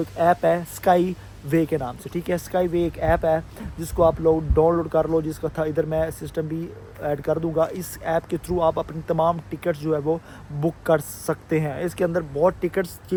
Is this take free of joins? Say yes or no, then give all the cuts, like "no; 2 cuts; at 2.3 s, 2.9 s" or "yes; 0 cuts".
yes; 0 cuts